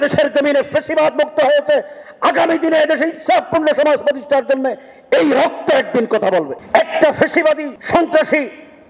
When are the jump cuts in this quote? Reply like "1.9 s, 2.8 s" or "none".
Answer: 6.6 s, 7.7 s